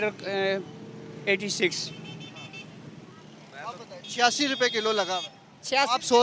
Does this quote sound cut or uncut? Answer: uncut